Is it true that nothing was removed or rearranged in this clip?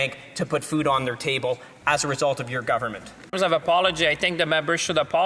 no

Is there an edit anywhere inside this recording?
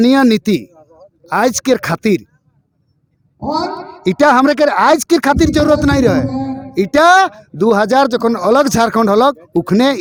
no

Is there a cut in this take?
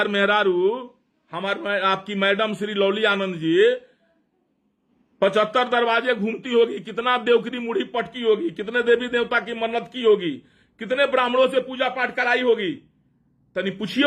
no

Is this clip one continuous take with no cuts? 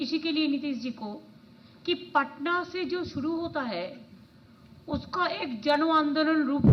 yes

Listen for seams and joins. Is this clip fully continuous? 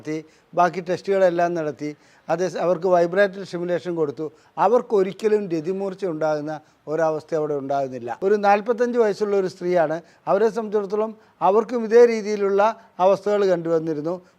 no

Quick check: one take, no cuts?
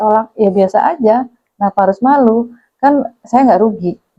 yes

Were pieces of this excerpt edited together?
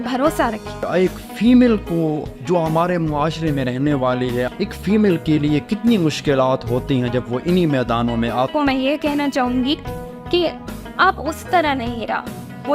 yes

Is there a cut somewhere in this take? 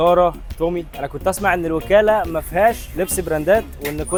no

